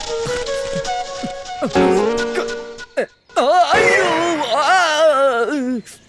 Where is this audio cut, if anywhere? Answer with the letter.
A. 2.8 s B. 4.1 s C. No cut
C